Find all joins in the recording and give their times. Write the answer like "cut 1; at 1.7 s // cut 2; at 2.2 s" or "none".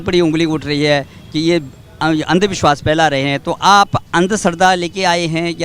none